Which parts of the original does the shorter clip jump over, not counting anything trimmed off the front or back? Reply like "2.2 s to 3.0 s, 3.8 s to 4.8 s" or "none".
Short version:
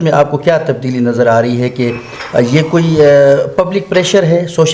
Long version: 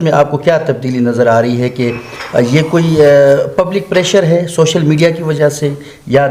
none